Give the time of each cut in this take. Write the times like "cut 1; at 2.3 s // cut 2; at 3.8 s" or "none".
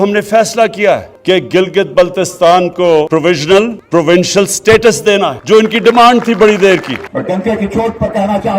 cut 1; at 1.1 s // cut 2; at 3.1 s // cut 3; at 3.8 s // cut 4; at 5.4 s // cut 5; at 7.0 s